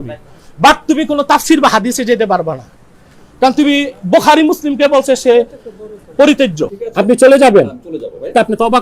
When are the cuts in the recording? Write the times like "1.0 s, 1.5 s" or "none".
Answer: 6.8 s